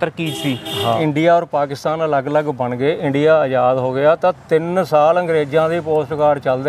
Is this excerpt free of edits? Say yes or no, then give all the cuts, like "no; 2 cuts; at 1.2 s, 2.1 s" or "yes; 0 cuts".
no; 1 cut; at 1.0 s